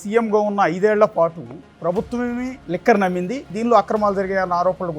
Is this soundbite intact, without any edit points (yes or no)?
no